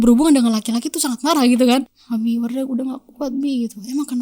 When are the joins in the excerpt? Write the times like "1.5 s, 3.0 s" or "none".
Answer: 1.9 s